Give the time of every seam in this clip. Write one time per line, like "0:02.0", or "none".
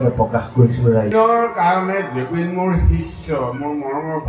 0:01.1